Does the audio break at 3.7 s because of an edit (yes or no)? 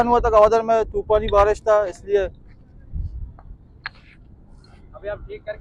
no